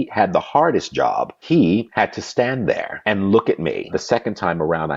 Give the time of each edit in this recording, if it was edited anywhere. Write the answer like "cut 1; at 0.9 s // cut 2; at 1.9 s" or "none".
cut 1; at 1.6 s // cut 2; at 2.9 s // cut 3; at 3.9 s